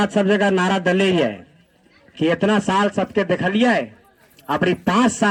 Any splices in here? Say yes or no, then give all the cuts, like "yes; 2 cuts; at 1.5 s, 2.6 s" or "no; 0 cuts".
no; 0 cuts